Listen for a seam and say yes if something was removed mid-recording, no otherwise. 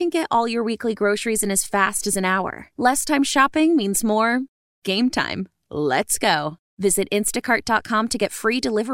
no